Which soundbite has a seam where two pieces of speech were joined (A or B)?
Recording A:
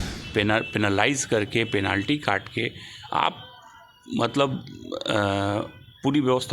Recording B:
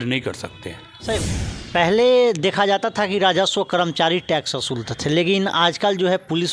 B